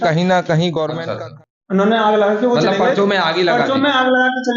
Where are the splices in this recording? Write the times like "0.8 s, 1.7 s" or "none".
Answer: 1.0 s